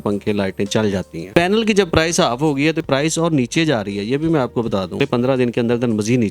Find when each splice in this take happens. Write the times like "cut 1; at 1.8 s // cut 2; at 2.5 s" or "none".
cut 1; at 1.3 s // cut 2; at 2.8 s // cut 3; at 5.0 s